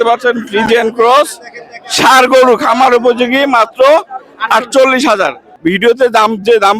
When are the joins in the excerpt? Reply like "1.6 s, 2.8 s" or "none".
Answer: 5.5 s